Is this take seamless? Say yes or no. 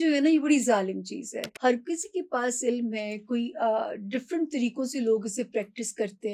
no